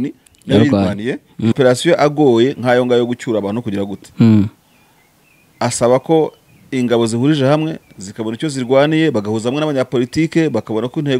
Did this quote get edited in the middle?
yes; 1 cut; at 1.5 s

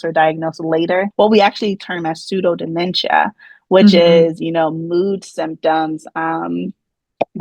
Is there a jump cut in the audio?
yes; 1 cut; at 1.1 s

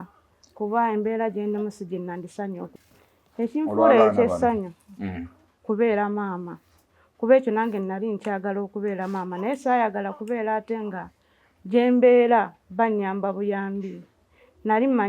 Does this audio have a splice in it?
yes; 1 cut; at 2.7 s

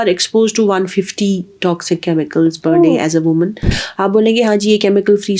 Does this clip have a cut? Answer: yes; 1 cut; at 3.8 s

